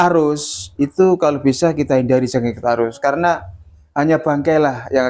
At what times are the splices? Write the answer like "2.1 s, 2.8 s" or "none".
none